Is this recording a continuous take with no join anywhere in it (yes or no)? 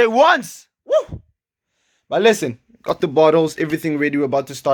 yes